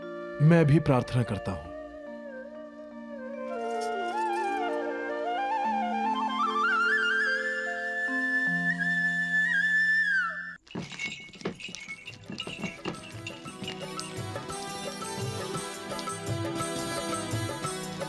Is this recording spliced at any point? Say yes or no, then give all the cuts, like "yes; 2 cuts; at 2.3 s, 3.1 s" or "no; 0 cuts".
no; 0 cuts